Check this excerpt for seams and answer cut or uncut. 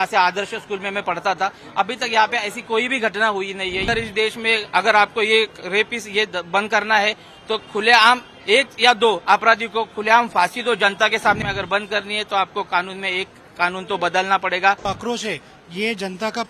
cut